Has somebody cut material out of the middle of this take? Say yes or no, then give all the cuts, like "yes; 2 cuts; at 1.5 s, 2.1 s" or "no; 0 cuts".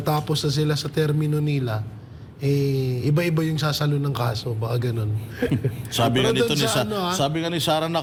no; 0 cuts